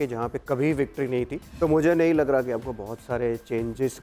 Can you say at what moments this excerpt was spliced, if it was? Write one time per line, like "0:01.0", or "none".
0:01.4